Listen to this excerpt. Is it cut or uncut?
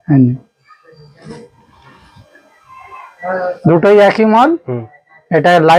uncut